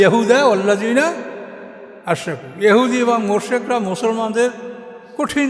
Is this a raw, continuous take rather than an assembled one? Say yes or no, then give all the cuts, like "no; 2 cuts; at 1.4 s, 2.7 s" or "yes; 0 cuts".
yes; 0 cuts